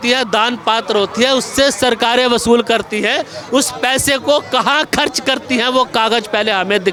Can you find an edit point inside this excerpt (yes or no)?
no